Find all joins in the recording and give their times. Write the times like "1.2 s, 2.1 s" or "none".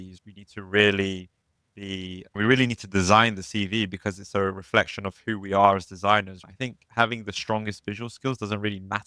6.4 s